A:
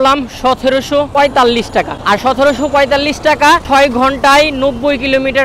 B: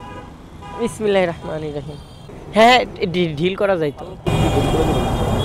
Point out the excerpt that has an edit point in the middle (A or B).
A